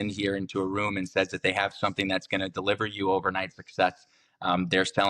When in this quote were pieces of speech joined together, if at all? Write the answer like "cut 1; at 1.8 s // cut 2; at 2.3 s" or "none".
none